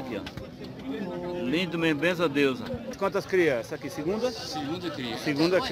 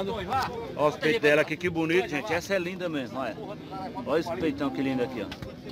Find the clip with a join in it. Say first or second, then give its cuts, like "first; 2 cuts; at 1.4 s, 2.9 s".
first; 1 cut; at 3.0 s